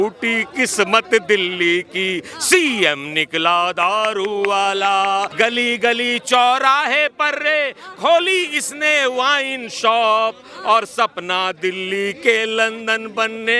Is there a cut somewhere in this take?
yes; 1 cut; at 5.3 s

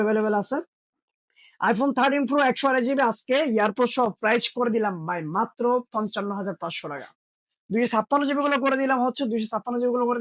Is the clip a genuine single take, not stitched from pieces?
yes; 0 cuts

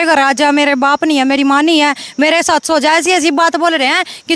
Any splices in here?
no; 0 cuts

